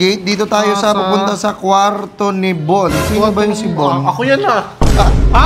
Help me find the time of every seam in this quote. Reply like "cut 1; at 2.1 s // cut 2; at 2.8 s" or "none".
none